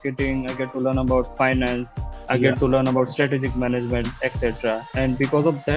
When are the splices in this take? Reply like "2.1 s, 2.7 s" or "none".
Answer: none